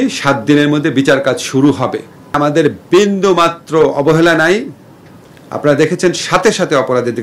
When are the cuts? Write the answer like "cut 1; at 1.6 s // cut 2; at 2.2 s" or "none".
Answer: cut 1; at 2.4 s